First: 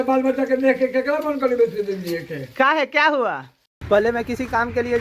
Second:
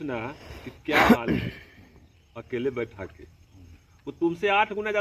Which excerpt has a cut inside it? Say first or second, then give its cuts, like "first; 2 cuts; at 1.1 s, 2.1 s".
first; 1 cut; at 3.7 s